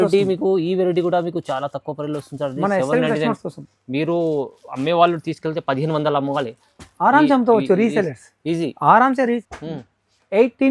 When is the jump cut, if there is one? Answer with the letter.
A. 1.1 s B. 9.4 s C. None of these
B